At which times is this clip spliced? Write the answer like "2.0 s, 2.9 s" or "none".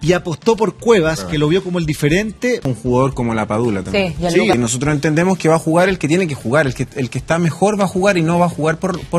2.7 s, 4.5 s